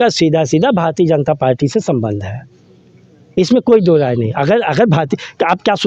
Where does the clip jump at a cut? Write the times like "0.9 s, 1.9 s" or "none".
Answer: none